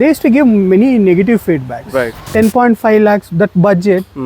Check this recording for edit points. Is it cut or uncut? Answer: cut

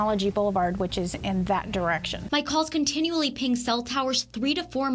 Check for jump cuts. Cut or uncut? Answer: uncut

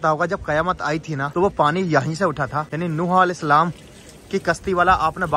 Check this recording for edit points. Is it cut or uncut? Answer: cut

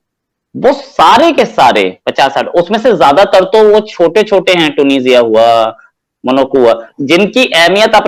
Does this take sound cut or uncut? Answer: uncut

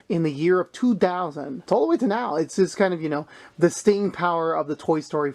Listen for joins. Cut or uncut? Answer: cut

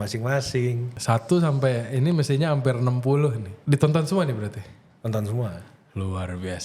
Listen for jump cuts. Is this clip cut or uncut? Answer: cut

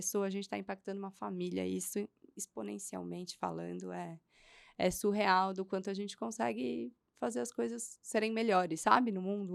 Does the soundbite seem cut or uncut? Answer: uncut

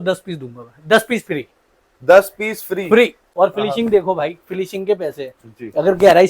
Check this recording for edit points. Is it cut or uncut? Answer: cut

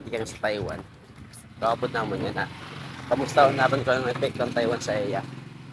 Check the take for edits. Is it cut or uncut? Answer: uncut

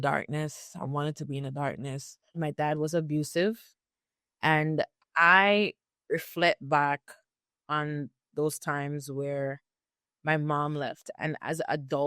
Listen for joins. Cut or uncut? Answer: cut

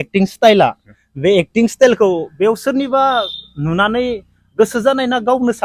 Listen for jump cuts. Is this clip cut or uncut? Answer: uncut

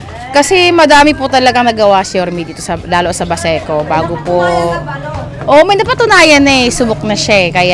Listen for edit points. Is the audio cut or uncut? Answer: uncut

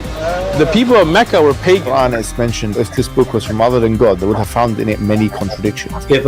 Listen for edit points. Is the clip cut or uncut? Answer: cut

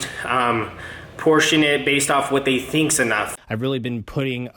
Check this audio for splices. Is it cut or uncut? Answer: cut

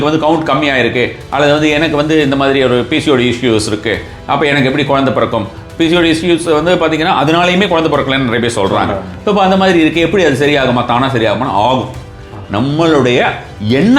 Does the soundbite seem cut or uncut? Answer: uncut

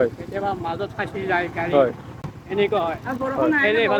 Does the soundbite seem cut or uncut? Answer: uncut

